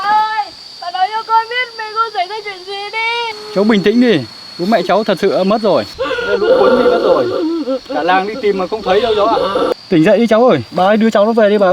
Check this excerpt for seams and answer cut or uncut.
cut